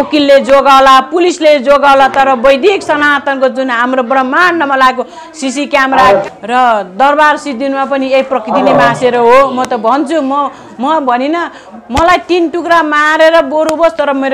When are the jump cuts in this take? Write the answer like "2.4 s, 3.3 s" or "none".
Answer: 6.2 s

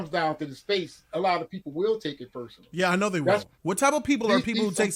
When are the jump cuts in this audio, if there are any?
3.5 s

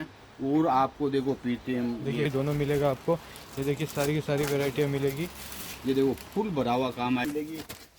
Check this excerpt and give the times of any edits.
2.3 s, 7.2 s

